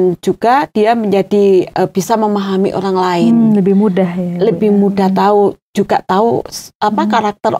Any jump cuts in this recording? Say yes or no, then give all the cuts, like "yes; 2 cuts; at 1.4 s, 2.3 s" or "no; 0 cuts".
no; 0 cuts